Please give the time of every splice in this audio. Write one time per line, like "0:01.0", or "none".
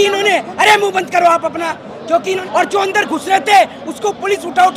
0:02.4